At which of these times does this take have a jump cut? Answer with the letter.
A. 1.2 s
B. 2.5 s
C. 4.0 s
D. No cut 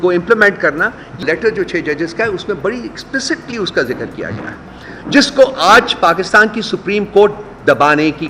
A